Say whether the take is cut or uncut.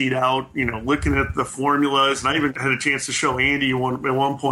cut